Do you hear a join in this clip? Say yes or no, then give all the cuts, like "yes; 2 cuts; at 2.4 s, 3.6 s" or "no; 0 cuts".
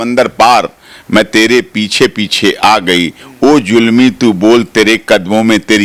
no; 0 cuts